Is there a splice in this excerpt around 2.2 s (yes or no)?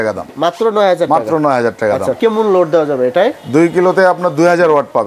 yes